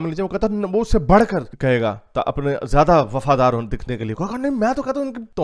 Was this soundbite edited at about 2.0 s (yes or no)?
no